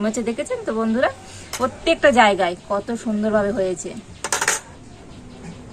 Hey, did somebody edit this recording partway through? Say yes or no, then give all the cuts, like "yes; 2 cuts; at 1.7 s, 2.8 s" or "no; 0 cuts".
yes; 2 cuts; at 1.5 s, 4.8 s